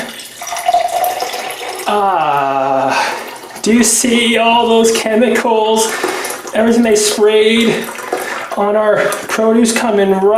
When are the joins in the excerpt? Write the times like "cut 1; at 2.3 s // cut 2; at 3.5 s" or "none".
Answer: none